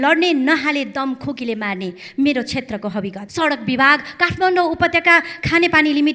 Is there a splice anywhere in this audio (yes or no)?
yes